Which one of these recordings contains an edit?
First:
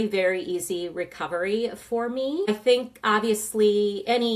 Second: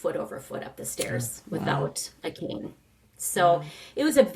first; 1 cut; at 2.5 s

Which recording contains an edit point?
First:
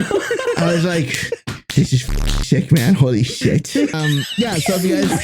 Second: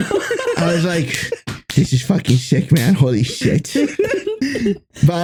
first; 1 cut; at 3.9 s

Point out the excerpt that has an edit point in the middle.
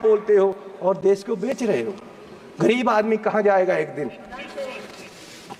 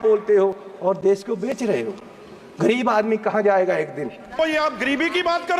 second; 1 cut; at 4.4 s

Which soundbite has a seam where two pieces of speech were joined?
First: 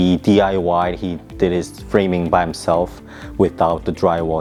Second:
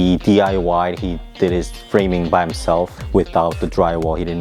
second; 1 cut; at 3.0 s

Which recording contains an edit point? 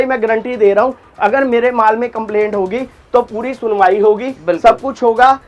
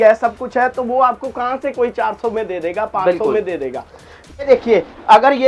second; 1 cut; at 4.4 s

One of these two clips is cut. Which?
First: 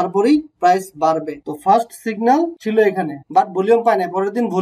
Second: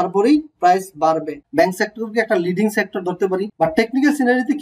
second; 2 cuts; at 1.4 s, 3.5 s

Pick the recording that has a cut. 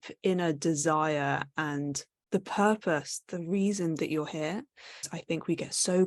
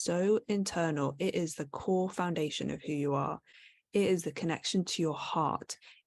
first; 2 cuts; at 2.1 s, 5.1 s

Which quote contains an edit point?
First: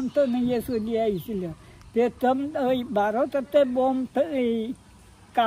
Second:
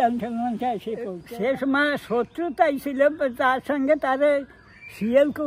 second; 1 cut; at 1.2 s

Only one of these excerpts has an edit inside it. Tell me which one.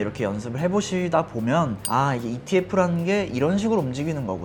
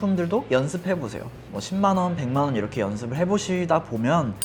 second; 1 cut; at 1.5 s

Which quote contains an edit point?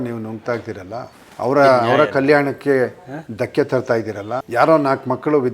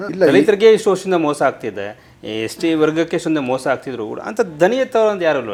first; 2 cuts; at 1.2 s, 4.5 s

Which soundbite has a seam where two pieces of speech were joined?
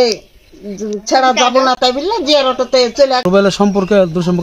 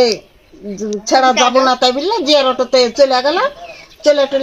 first; 1 cut; at 3.2 s

